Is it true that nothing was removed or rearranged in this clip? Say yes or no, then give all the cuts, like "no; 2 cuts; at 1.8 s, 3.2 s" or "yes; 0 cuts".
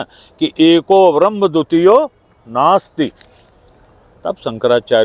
yes; 0 cuts